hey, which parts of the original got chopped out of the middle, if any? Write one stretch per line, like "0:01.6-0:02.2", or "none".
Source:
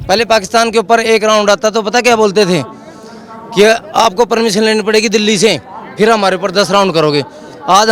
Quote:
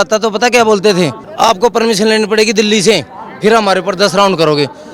0:02.8-0:03.8